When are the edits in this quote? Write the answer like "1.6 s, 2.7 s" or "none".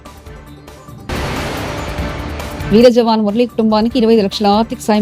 2.6 s